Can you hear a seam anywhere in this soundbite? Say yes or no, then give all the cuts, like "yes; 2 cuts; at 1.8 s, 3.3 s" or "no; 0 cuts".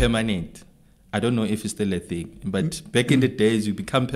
no; 0 cuts